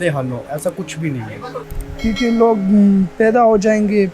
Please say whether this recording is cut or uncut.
cut